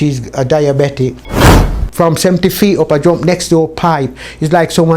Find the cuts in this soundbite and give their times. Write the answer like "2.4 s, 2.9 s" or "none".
1.6 s